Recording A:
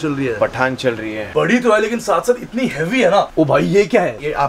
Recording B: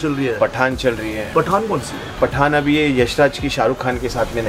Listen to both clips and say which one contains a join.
A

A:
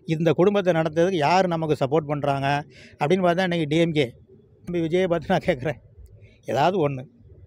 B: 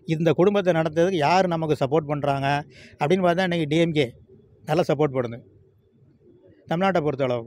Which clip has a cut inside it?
A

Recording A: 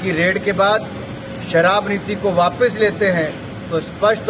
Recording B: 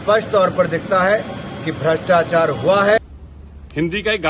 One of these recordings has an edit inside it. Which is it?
B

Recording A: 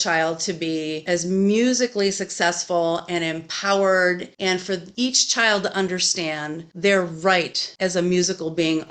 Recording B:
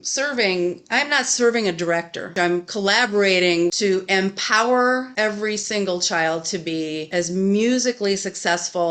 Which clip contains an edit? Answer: B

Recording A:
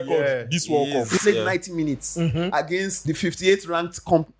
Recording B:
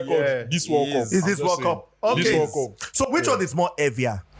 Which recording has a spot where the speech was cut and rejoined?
A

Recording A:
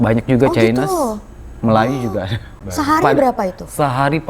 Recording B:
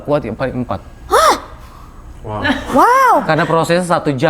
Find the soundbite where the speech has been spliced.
A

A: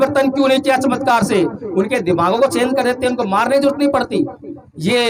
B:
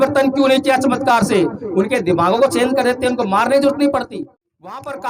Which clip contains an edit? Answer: B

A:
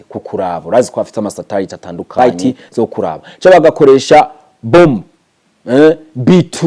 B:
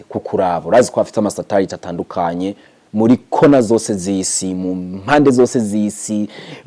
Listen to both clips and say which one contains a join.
A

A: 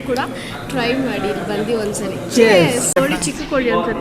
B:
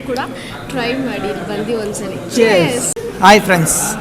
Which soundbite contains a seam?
A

